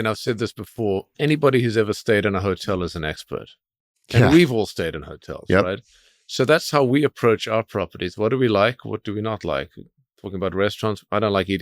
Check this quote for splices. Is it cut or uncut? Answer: cut